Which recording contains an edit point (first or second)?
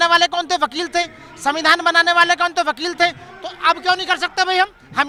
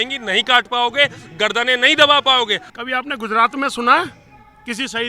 second